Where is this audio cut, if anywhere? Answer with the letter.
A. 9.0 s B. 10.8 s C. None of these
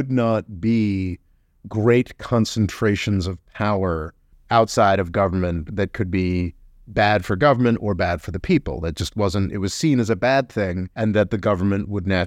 B